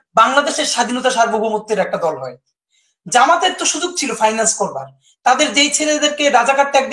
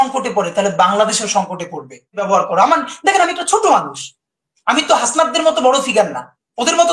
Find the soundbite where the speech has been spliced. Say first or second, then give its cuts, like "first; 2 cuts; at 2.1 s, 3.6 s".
second; 1 cut; at 2.3 s